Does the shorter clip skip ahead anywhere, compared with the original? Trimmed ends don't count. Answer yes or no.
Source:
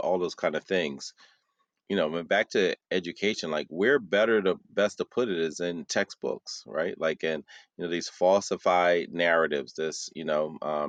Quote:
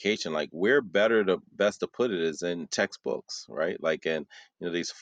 no